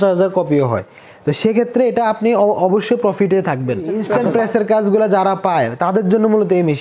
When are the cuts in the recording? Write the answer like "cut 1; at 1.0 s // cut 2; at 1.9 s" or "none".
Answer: cut 1; at 3.9 s